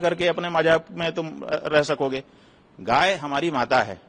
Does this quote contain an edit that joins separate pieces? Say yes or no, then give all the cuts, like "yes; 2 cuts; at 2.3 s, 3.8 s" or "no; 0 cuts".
no; 0 cuts